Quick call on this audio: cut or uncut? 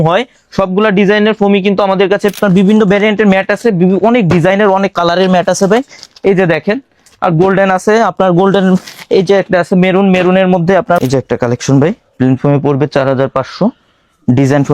cut